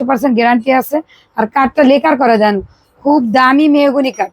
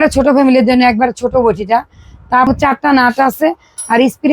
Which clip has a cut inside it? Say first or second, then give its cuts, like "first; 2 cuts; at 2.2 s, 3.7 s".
second; 1 cut; at 2.5 s